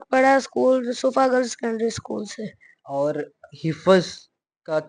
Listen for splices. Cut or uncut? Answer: uncut